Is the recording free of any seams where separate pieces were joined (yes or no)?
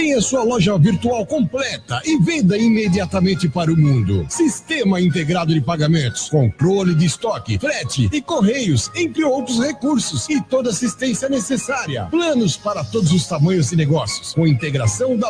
yes